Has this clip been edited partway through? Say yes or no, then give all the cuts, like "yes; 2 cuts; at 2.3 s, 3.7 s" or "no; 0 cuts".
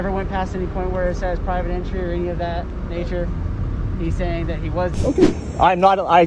yes; 1 cut; at 4.9 s